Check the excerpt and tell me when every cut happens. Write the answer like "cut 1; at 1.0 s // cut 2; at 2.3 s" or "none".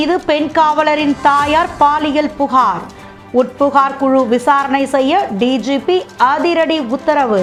none